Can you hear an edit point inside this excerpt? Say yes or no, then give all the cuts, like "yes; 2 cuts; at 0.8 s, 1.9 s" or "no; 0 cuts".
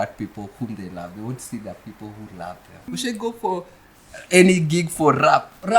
yes; 1 cut; at 2.9 s